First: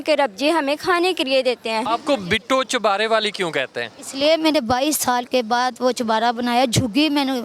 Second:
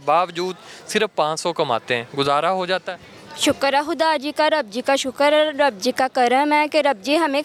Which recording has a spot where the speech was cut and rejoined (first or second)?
first